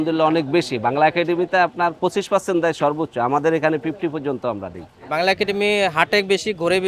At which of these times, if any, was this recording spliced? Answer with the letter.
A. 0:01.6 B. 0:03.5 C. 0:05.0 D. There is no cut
C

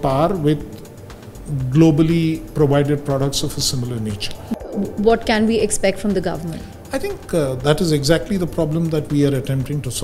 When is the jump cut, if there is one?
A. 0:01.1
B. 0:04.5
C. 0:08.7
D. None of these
B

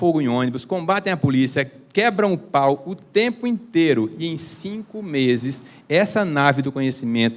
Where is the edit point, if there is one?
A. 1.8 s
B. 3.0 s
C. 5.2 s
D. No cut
D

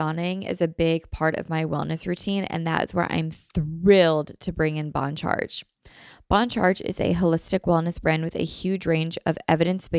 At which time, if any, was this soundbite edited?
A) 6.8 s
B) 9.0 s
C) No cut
C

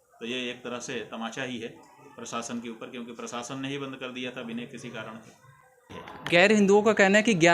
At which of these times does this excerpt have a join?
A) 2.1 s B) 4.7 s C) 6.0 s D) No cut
C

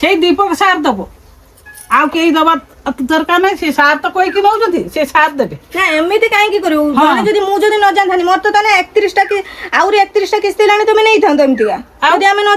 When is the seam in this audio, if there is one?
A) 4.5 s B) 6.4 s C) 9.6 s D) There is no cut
D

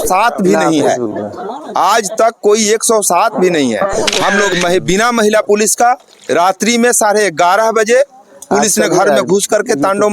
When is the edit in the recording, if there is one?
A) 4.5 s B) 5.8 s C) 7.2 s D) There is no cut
A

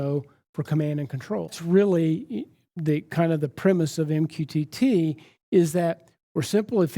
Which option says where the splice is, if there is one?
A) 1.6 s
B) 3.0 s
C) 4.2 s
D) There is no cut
A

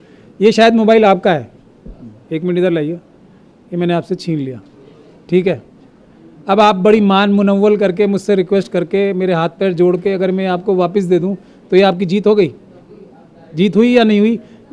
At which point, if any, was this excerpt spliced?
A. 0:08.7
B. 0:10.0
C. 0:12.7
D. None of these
D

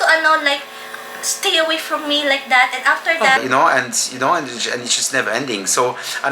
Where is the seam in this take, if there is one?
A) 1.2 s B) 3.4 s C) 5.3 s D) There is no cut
B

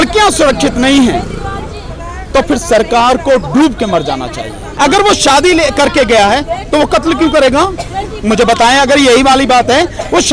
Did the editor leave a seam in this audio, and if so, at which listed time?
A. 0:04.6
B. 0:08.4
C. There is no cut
A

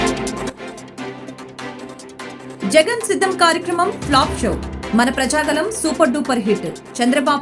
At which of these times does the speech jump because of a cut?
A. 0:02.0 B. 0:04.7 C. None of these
A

